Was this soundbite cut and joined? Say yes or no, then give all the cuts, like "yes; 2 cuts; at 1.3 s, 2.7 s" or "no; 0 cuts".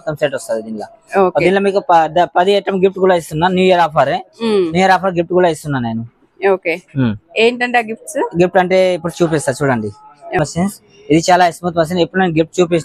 yes; 1 cut; at 10.4 s